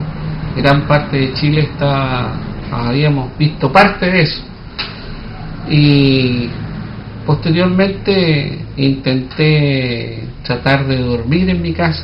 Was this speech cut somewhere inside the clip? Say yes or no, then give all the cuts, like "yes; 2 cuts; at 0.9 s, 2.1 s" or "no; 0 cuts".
no; 0 cuts